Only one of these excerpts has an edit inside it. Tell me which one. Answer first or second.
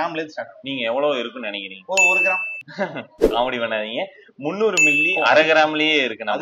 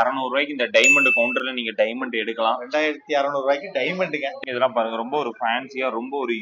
second